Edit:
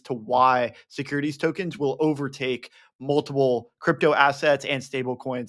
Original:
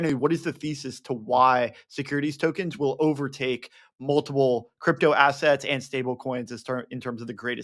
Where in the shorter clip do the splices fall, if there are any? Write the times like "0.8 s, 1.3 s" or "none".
none